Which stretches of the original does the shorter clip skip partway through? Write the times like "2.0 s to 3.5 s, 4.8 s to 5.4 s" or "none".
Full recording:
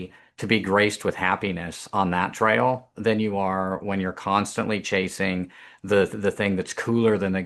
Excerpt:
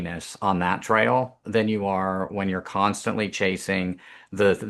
none